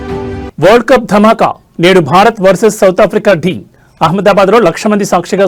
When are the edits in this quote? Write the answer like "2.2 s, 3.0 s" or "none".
none